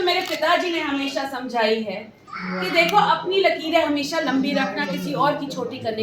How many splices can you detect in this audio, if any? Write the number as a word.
zero